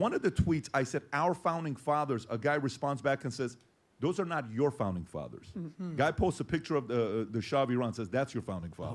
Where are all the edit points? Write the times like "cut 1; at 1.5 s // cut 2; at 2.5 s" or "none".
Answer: none